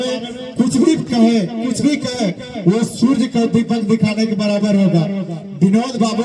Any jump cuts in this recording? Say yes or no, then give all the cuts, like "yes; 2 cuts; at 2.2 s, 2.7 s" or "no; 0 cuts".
no; 0 cuts